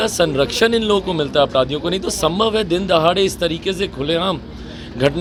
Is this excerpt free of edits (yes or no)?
yes